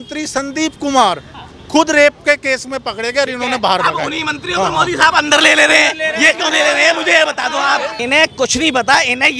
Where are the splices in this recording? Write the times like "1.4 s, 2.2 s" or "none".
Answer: 7.9 s